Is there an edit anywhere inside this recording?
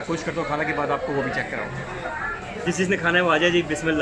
yes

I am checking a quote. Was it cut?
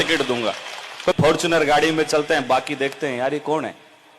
yes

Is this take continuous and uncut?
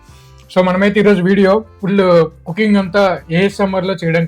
no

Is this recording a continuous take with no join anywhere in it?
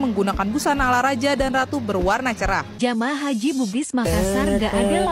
no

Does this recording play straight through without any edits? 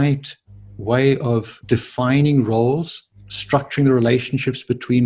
no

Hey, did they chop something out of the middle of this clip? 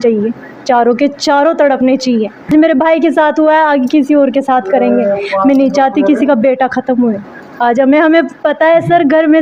yes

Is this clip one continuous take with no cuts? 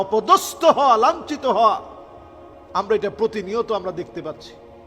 yes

